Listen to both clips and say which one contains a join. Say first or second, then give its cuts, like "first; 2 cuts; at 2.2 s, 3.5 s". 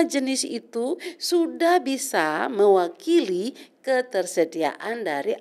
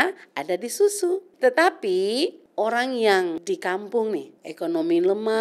second; 4 cuts; at 1.3 s, 2.4 s, 3.4 s, 4.4 s